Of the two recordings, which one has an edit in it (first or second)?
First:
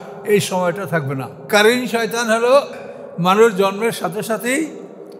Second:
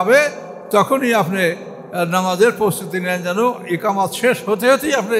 first